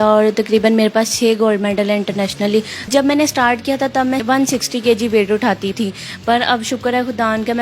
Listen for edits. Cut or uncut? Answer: cut